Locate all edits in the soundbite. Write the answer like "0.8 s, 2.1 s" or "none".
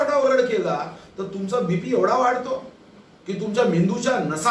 none

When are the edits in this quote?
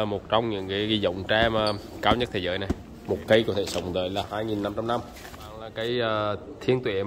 2.9 s, 4.3 s, 5.7 s

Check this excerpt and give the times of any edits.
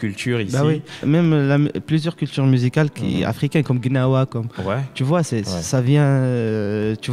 1.0 s

